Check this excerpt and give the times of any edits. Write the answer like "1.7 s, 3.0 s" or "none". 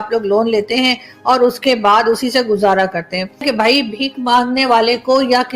3.5 s